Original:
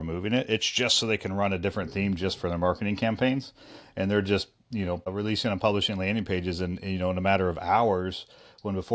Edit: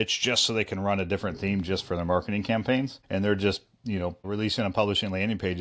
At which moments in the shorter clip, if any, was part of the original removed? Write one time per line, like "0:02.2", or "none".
0:03.0